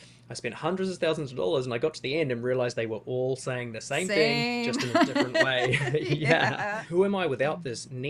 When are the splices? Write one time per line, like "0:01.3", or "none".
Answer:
0:06.6